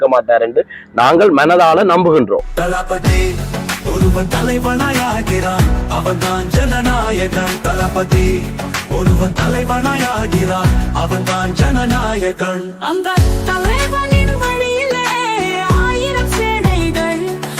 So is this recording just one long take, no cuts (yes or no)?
no